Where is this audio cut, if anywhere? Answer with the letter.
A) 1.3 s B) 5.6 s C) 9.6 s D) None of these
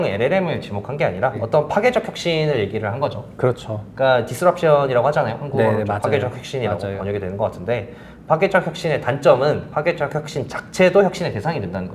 A